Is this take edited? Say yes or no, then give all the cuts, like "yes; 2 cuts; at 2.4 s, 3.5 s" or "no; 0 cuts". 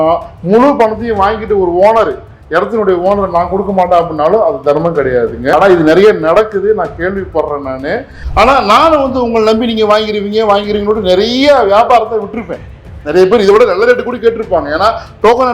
yes; 2 cuts; at 5.5 s, 8.2 s